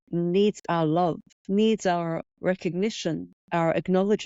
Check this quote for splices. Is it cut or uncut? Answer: cut